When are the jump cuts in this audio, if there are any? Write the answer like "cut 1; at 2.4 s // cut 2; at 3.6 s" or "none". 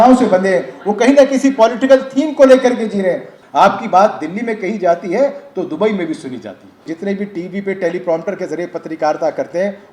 cut 1; at 3.4 s // cut 2; at 6.9 s